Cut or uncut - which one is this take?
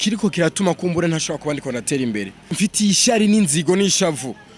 cut